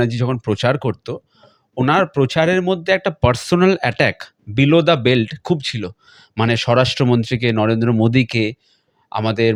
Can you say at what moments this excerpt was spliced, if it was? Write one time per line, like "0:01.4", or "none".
none